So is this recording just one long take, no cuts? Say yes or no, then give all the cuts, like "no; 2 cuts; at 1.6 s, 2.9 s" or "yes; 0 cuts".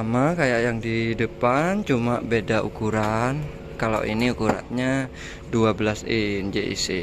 yes; 0 cuts